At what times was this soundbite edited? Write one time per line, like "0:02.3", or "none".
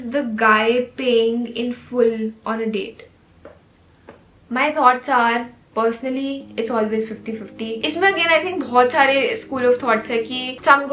none